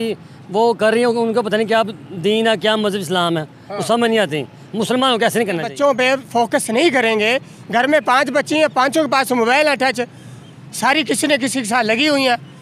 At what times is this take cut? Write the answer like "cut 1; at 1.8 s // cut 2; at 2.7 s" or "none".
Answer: cut 1; at 5.7 s